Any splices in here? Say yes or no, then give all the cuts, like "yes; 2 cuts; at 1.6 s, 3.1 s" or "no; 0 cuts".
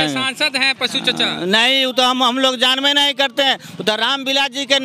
no; 0 cuts